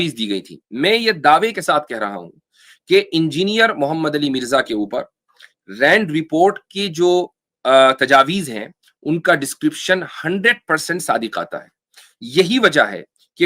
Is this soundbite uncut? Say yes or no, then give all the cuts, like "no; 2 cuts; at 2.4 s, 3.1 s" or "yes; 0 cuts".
yes; 0 cuts